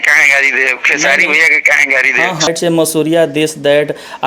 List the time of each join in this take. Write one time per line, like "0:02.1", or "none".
0:02.5